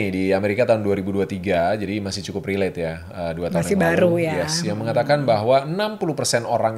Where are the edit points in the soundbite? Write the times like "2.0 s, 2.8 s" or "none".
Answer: none